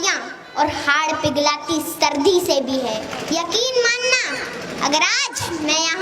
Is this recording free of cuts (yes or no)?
no